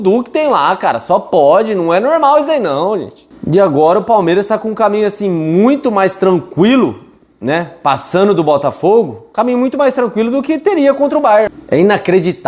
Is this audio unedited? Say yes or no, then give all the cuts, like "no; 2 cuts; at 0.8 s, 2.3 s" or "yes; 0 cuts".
no; 1 cut; at 11.5 s